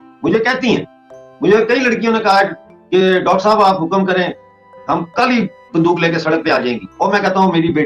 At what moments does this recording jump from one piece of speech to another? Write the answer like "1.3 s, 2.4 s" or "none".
none